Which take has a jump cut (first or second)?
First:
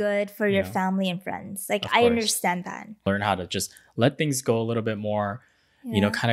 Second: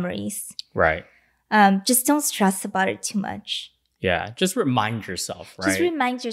first